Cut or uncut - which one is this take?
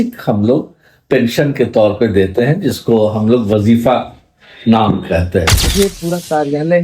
cut